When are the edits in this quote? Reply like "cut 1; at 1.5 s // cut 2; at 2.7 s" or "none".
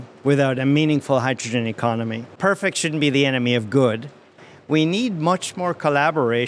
cut 1; at 2.2 s // cut 2; at 4.3 s